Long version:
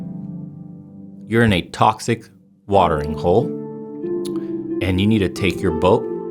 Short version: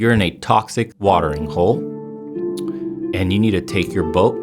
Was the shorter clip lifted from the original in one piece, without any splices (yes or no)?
no